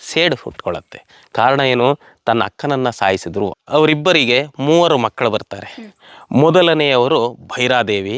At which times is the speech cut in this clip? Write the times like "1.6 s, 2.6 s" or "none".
3.5 s